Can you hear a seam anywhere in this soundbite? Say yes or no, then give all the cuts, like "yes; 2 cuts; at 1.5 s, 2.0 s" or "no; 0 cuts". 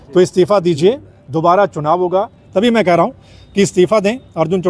yes; 1 cut; at 2.4 s